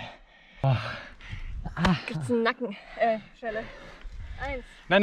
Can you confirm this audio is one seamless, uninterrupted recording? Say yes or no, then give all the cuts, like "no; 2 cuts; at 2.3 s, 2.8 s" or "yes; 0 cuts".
yes; 0 cuts